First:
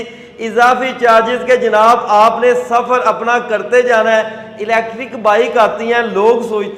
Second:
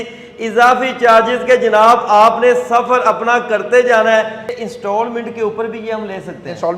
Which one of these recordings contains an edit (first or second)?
second